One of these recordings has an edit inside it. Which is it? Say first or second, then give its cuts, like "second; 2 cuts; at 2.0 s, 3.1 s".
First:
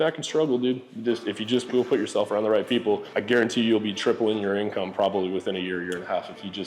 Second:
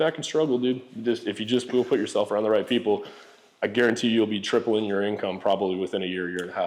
first; 1 cut; at 3.1 s